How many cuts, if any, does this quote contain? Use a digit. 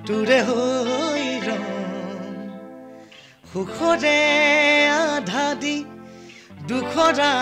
0